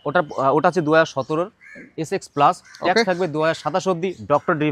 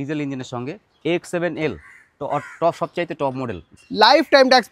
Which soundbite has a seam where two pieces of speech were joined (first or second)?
second